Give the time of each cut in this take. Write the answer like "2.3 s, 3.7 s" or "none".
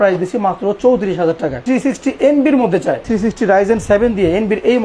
1.6 s, 3.0 s